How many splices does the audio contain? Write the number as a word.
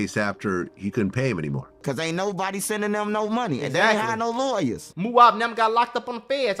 two